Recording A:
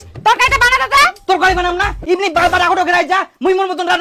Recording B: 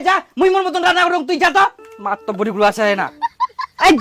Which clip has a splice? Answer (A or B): B